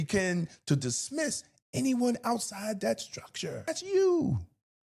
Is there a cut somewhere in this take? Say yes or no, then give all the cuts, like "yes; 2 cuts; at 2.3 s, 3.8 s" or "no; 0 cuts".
yes; 1 cut; at 3.7 s